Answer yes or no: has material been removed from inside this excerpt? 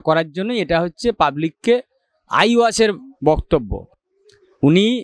no